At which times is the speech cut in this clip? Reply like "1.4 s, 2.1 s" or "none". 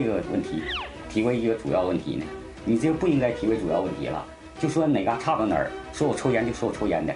none